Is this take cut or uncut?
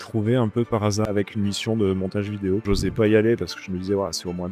cut